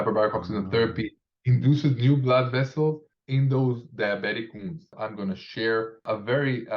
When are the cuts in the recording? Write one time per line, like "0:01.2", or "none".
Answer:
0:03.1
0:05.0
0:06.0